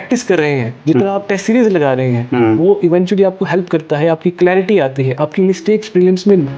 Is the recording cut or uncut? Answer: uncut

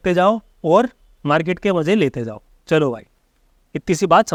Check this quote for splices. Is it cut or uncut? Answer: uncut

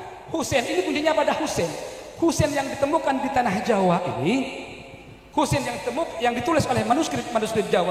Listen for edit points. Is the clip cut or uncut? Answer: uncut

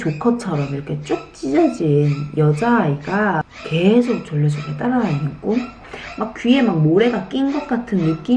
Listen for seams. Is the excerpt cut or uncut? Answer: cut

